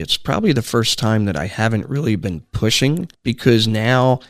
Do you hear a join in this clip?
yes; 1 cut; at 3.1 s

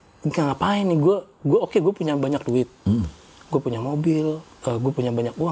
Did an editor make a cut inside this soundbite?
yes; 1 cut; at 4.5 s

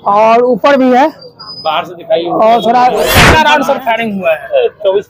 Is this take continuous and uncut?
no; 1 cut; at 3.2 s

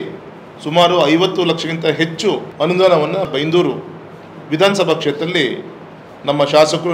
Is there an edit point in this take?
yes; 2 cuts; at 2.5 s, 3.3 s

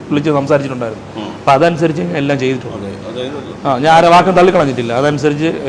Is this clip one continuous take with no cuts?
yes; 0 cuts

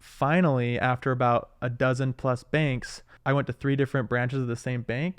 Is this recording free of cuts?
no; 1 cut; at 3.1 s

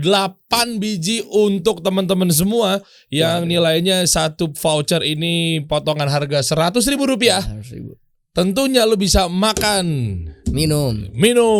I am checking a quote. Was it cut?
no; 0 cuts

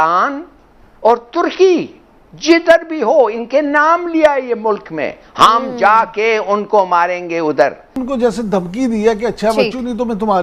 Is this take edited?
yes; 1 cut; at 7.9 s

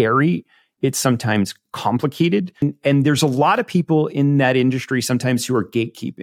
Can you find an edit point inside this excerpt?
yes; 1 cut; at 2.6 s

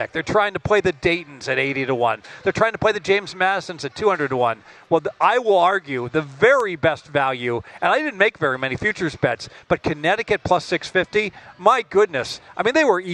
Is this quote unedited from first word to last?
yes; 0 cuts

